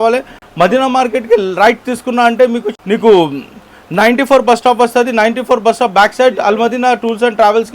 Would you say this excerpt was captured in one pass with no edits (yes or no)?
no